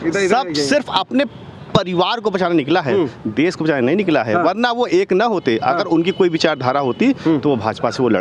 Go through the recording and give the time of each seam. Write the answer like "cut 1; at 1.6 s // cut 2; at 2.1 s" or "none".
none